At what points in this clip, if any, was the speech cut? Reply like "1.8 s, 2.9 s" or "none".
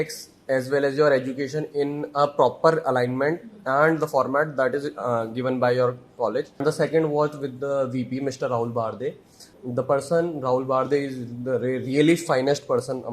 6.6 s, 9.5 s